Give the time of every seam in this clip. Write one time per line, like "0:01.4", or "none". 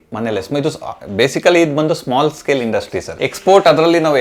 0:03.1